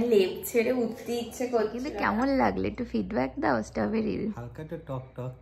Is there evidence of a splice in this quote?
yes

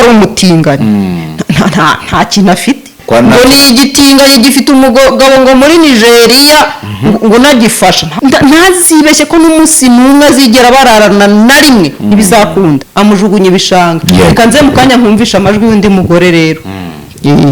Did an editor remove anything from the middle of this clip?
yes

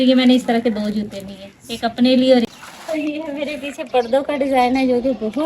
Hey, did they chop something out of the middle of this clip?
yes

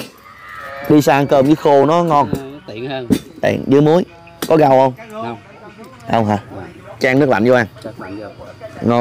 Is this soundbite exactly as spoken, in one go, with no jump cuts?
yes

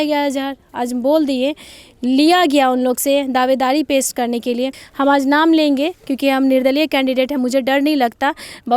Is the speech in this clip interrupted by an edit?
yes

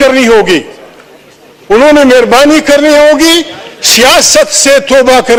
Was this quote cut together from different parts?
no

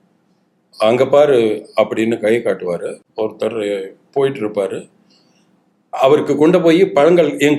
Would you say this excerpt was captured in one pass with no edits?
no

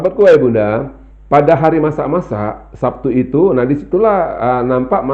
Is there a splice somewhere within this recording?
no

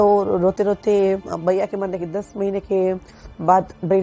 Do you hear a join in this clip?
no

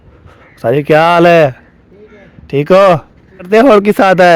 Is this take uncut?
no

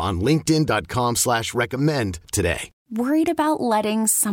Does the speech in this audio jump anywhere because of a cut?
yes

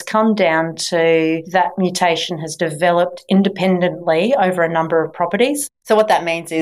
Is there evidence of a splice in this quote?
yes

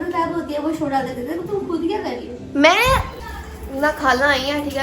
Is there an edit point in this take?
yes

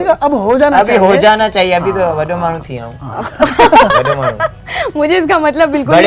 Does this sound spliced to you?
no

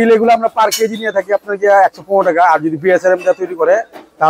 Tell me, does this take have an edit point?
no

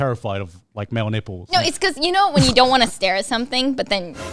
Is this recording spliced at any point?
no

